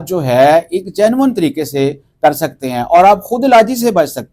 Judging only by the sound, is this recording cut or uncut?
uncut